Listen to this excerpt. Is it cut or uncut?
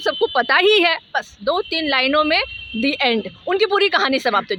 uncut